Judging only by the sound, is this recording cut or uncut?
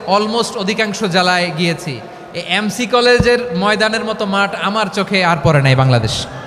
uncut